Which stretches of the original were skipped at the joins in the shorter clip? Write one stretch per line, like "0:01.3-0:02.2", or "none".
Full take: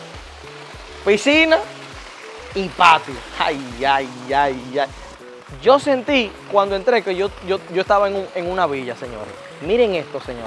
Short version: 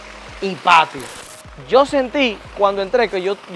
0:03.2-0:05.0